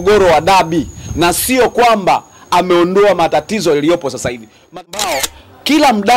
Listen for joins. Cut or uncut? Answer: cut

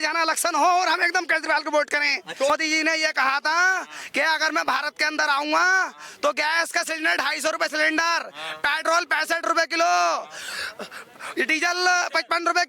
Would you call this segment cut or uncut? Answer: cut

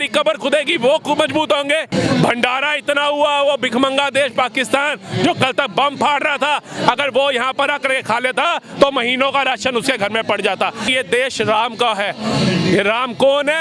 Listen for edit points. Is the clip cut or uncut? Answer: cut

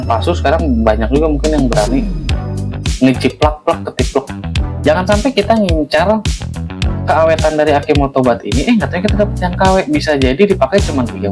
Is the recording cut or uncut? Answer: cut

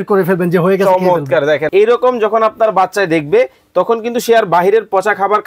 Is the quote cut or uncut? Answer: cut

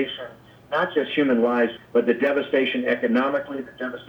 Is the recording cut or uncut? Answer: cut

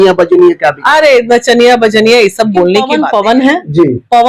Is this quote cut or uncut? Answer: cut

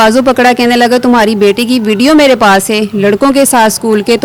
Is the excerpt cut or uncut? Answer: uncut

